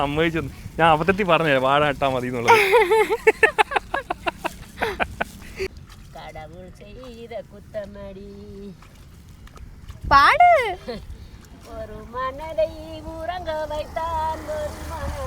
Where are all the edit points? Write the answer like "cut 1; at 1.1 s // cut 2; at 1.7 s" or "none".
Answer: cut 1; at 5.7 s